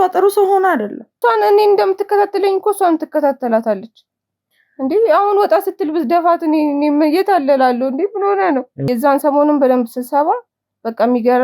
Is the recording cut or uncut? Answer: cut